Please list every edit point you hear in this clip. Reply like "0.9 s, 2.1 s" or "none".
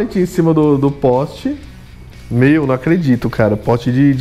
none